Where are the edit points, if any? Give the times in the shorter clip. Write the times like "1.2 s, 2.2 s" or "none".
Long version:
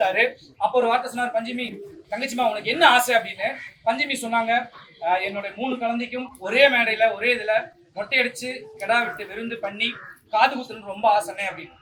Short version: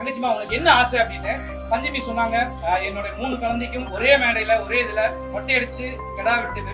2.6 s, 3.9 s, 5.3 s